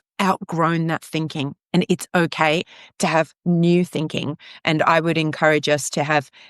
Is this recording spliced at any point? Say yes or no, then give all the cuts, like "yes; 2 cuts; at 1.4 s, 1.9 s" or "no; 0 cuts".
yes; 1 cut; at 2.7 s